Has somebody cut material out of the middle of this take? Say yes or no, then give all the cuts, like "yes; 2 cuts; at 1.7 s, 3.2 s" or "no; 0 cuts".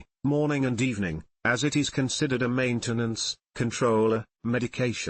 no; 0 cuts